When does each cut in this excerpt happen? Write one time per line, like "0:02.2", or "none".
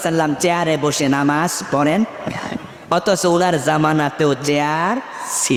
none